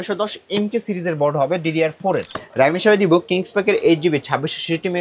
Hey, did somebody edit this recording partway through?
yes; 1 cut; at 2.4 s

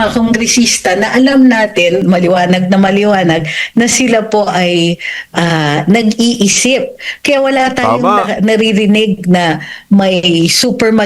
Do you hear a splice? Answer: no; 0 cuts

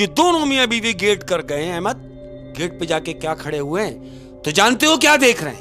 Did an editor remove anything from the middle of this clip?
no; 0 cuts

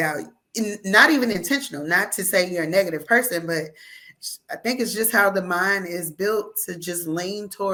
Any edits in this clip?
no; 0 cuts

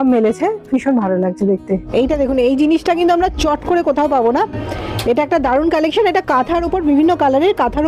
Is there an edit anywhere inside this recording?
yes; 1 cut; at 1.9 s

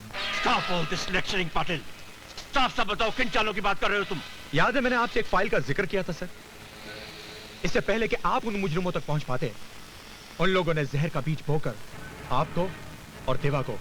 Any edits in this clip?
no; 0 cuts

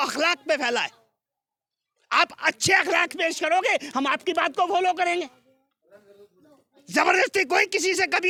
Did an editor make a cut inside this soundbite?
no; 0 cuts

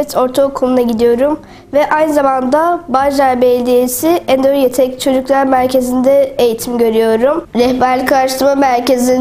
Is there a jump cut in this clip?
yes; 1 cut; at 7.5 s

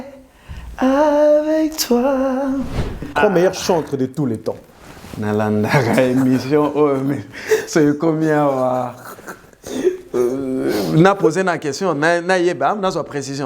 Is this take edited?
yes; 1 cut; at 3.1 s

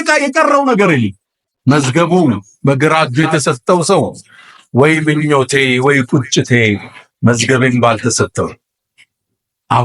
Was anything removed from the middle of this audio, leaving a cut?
yes; 1 cut; at 1.1 s

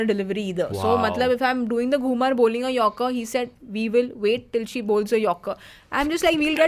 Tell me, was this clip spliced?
no; 0 cuts

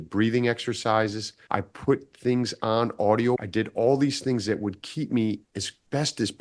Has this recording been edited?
yes; 1 cut; at 3.4 s

